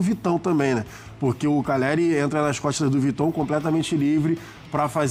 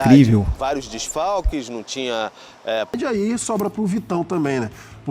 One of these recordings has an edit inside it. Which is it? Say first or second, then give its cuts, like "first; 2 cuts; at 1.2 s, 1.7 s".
second; 1 cut; at 2.9 s